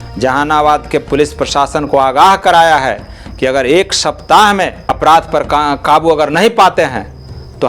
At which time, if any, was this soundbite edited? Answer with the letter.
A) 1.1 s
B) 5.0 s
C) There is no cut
B